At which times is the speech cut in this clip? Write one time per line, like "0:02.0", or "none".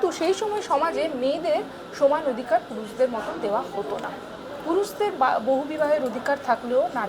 none